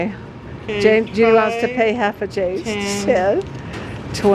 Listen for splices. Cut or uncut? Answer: uncut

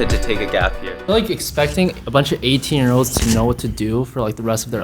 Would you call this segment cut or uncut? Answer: cut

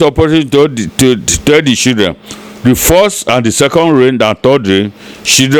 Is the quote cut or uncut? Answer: uncut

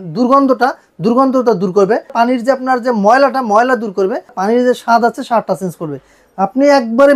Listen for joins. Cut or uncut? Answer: cut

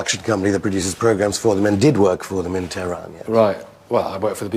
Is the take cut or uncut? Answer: uncut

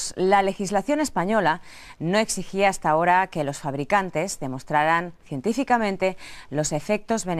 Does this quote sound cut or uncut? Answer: uncut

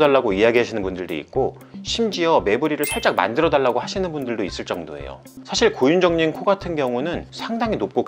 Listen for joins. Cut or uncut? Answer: cut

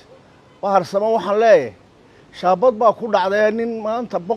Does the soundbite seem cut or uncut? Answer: uncut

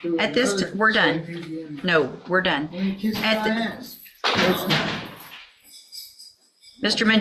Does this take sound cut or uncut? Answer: uncut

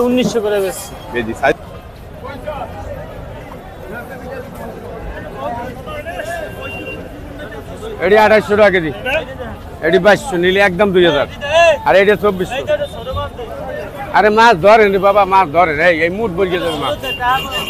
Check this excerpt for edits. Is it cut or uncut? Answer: cut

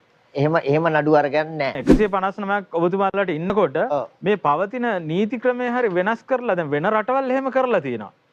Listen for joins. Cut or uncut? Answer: cut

